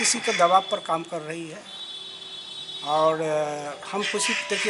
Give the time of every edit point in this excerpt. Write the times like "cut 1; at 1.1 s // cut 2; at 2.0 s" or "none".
none